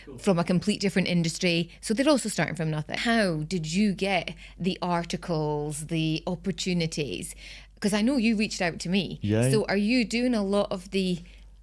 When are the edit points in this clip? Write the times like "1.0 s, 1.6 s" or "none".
3.0 s